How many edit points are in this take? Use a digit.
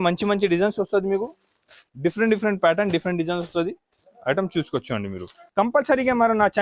1